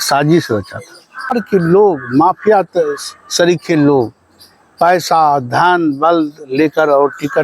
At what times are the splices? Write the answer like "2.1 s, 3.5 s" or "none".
1.3 s

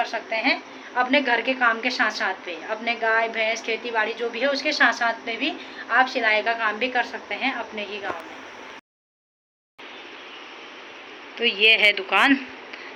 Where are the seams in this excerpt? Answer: none

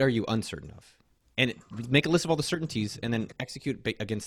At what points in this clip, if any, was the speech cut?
none

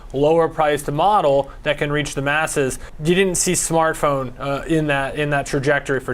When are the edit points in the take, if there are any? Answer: 2.9 s

